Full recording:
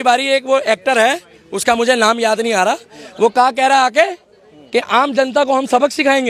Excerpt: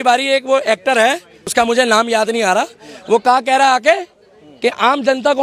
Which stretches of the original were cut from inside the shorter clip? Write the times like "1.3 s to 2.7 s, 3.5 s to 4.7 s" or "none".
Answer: 1.3 s to 1.4 s